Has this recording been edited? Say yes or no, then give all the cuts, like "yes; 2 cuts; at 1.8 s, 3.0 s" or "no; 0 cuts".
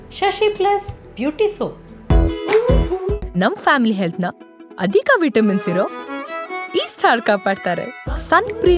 yes; 1 cut; at 1.9 s